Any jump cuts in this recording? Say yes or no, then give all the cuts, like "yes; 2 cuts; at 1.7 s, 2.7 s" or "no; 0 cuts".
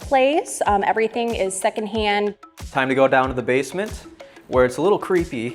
yes; 1 cut; at 2.6 s